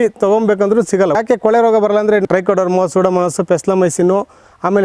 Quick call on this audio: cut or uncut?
cut